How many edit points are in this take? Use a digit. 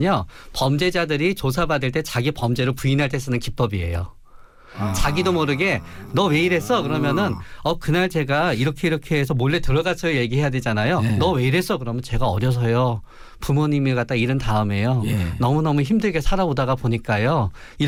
0